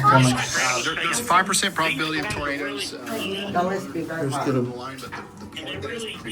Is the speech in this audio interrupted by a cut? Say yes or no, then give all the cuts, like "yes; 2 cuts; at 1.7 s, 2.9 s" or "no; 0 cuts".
no; 0 cuts